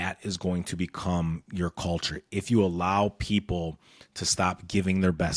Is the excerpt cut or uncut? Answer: uncut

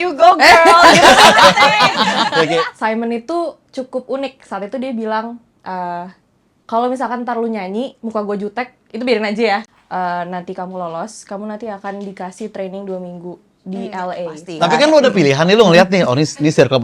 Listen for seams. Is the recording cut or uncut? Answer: cut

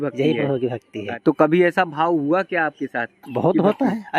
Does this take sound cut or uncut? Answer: cut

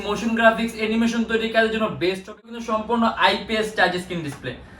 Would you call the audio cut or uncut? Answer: cut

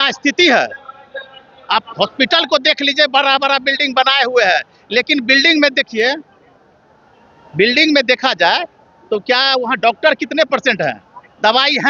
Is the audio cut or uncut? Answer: uncut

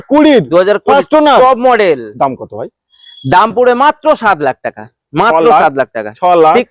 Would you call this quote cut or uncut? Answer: uncut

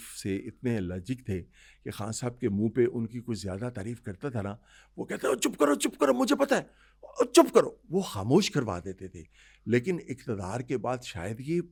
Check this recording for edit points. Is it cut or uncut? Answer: uncut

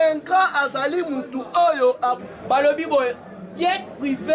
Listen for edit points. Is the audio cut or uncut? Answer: cut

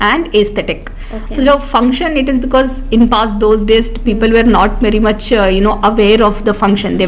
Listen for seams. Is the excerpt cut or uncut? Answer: uncut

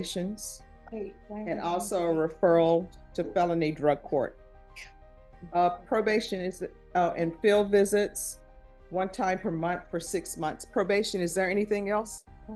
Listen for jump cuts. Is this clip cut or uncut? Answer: uncut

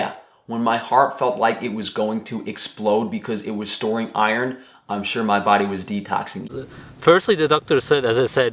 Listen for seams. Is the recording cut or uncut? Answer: cut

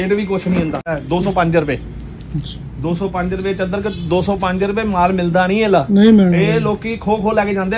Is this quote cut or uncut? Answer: cut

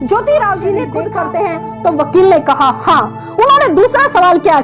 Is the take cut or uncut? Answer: cut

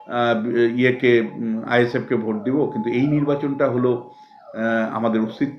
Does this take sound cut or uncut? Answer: uncut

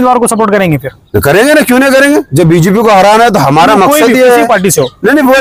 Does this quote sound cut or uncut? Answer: uncut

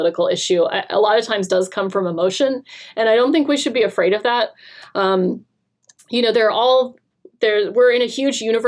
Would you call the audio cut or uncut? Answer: uncut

